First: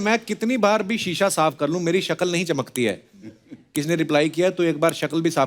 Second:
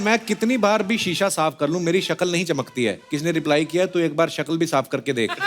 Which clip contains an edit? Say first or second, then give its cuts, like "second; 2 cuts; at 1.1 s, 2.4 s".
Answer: second; 1 cut; at 3.0 s